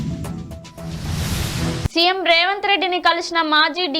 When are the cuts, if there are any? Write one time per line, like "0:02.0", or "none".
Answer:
0:01.7